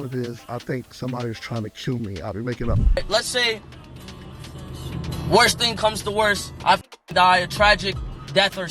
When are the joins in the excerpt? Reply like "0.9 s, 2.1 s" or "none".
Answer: 2.8 s